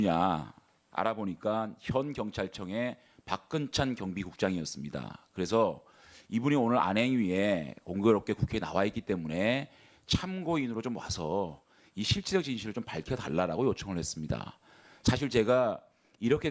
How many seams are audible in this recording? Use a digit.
1